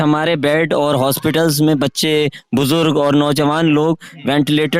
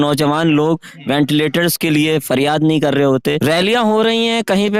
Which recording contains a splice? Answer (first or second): second